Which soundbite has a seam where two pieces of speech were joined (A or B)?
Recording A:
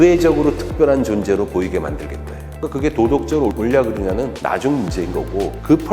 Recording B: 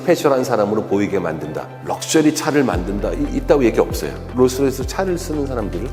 A